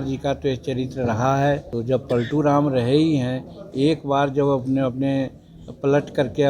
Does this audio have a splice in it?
yes; 1 cut; at 1.7 s

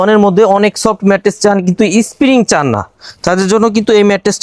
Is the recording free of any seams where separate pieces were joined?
yes; 0 cuts

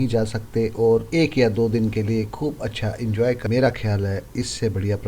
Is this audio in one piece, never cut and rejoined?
no; 1 cut; at 3.7 s

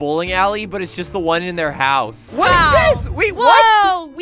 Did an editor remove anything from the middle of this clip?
yes; 1 cut; at 2.2 s

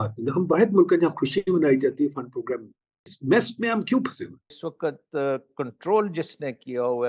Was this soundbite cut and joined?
yes; 2 cuts; at 3.2 s, 4.6 s

